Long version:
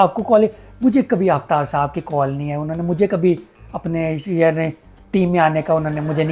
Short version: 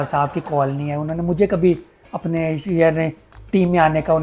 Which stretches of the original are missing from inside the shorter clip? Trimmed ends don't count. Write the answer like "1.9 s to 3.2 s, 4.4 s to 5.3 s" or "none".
none